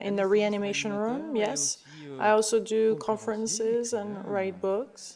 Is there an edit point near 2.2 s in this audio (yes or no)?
yes